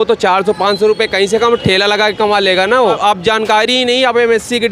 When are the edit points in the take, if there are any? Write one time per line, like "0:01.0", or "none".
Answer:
0:03.0